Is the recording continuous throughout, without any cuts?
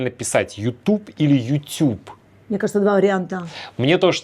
yes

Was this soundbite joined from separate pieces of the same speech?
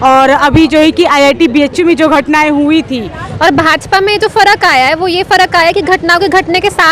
yes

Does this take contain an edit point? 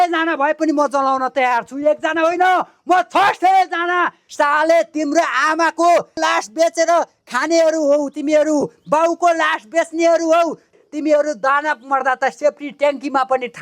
yes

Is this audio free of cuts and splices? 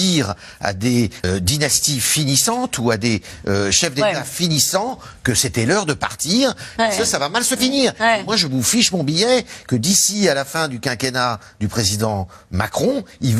no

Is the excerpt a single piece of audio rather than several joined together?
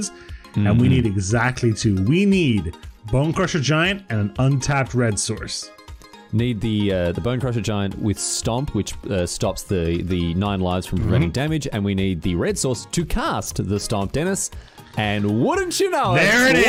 yes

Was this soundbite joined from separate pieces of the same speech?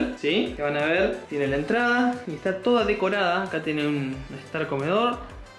no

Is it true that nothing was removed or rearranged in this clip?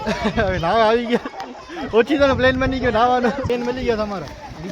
no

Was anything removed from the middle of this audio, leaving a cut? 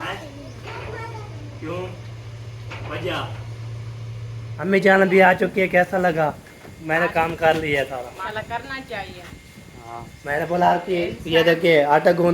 yes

